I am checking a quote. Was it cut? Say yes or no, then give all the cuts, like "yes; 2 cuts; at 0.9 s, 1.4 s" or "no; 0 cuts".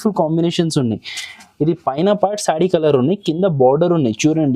no; 0 cuts